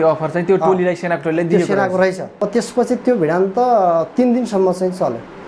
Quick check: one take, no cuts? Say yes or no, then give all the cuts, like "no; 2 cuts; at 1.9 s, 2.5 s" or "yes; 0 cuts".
no; 1 cut; at 2.5 s